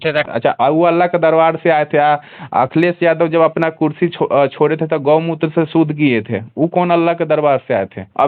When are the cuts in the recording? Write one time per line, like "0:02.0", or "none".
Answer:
none